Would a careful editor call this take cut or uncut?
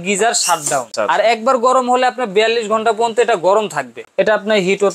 cut